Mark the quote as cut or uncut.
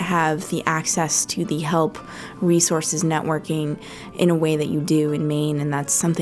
uncut